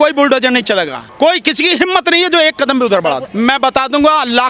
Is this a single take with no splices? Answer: no; 2 cuts; at 1.0 s, 3.3 s

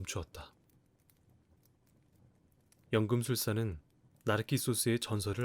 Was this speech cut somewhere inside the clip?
yes; 2 cuts; at 1.0 s, 2.5 s

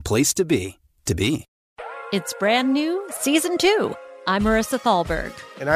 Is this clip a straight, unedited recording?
no; 1 cut; at 1.5 s

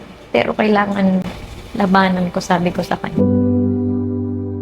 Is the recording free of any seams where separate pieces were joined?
no; 1 cut; at 3.0 s

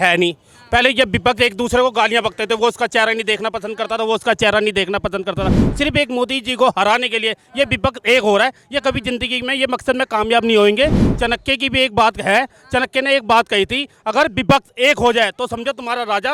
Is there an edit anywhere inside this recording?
no; 0 cuts

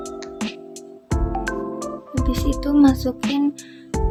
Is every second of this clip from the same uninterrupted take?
yes; 0 cuts

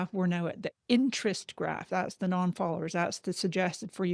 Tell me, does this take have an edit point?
no; 0 cuts

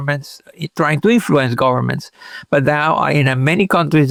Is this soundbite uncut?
yes; 0 cuts

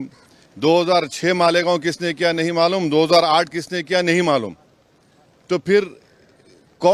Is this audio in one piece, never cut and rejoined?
yes; 0 cuts

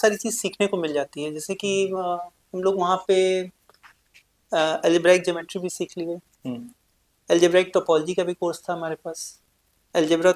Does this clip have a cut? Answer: no; 0 cuts

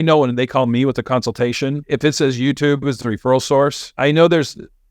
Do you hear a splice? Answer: yes; 2 cuts; at 1.8 s, 3.8 s

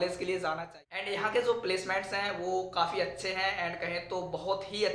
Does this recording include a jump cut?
yes; 1 cut; at 1.1 s

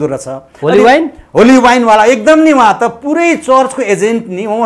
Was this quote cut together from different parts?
no; 0 cuts

